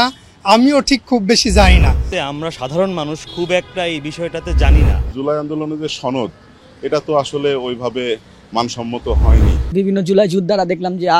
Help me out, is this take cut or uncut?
cut